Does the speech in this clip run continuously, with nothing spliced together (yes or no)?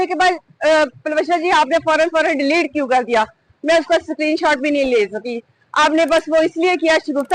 yes